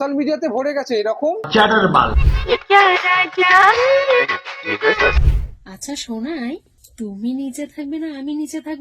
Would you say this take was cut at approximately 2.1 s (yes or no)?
yes